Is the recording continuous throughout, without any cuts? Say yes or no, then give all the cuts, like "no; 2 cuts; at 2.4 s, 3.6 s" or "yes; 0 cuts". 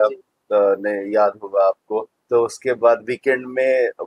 no; 1 cut; at 2.2 s